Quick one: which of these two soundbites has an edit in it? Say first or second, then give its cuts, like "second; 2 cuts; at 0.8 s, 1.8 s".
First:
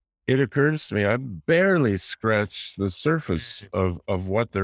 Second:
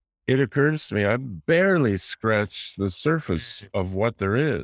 second; 1 cut; at 3.6 s